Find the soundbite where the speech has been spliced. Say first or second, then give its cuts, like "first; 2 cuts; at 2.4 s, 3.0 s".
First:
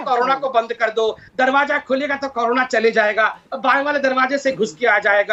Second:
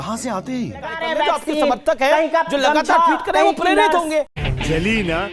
second; 1 cut; at 1.0 s